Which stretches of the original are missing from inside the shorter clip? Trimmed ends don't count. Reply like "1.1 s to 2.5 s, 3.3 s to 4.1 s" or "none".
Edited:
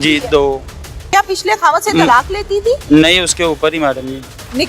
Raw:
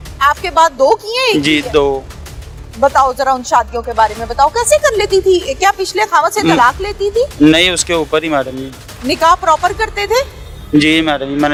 2.4 s to 5.5 s